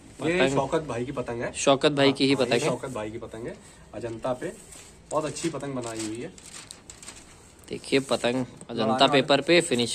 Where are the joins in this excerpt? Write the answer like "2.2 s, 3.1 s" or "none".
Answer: none